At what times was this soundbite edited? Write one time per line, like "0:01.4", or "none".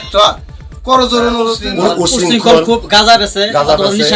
0:01.6